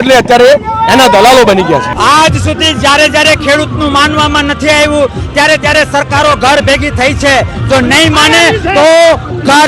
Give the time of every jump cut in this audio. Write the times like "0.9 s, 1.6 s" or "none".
1.9 s